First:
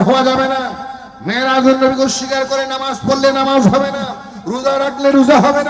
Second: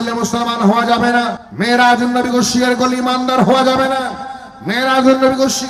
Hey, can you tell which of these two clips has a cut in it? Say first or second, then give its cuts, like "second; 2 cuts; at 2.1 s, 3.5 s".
second; 1 cut; at 1.4 s